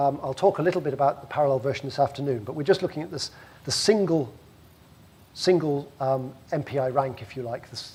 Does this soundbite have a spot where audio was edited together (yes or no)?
no